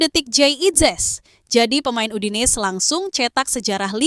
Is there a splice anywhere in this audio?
no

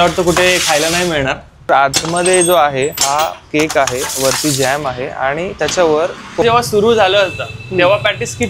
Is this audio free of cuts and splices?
no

